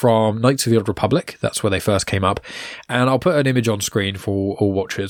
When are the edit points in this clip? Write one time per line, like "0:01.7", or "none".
none